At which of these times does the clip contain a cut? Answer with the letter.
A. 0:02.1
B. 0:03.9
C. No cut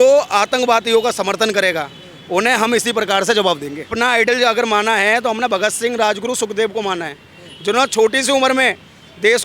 B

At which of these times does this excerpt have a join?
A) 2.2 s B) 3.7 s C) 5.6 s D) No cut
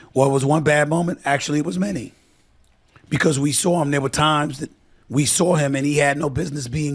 C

